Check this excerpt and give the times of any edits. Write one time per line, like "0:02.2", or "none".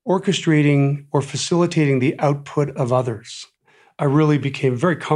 0:03.4